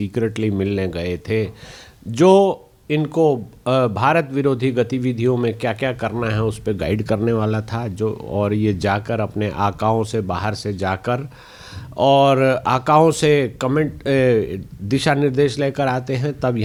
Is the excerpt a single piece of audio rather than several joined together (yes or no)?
yes